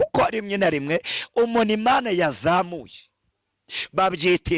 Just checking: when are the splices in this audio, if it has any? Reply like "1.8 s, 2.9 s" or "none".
none